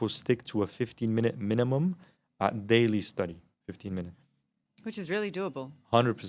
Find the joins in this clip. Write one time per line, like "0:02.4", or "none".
none